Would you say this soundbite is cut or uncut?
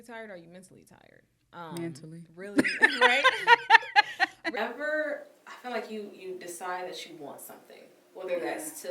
cut